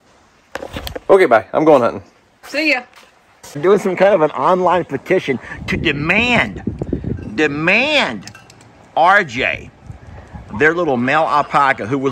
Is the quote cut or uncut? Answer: cut